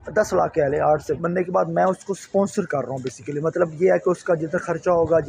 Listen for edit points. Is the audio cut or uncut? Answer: cut